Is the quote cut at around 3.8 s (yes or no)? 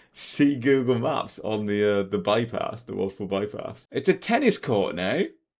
yes